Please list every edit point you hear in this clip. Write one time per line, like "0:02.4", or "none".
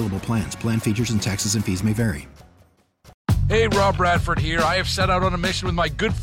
0:03.1